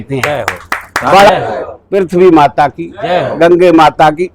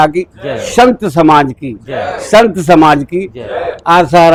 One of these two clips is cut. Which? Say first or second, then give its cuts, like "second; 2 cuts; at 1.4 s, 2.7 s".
first; 1 cut; at 1.3 s